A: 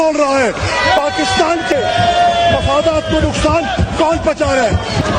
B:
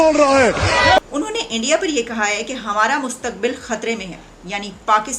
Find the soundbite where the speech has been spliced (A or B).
B